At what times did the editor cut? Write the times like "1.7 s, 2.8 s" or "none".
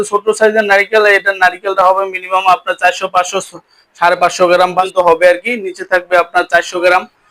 4.9 s